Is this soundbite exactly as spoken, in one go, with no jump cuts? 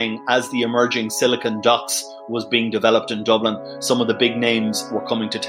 yes; 0 cuts

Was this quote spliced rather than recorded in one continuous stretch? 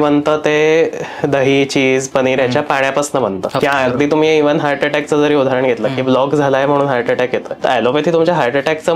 yes; 2 cuts; at 3.5 s, 7.5 s

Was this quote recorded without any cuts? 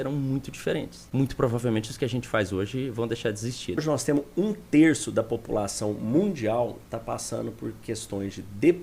no; 2 cuts; at 1.0 s, 3.8 s

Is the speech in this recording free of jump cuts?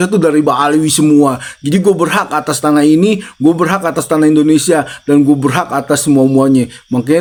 yes; 0 cuts

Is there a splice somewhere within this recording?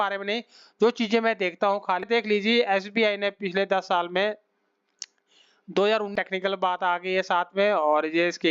yes; 2 cuts; at 2.0 s, 6.1 s

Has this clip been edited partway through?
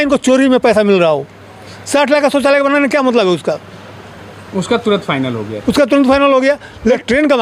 no; 0 cuts

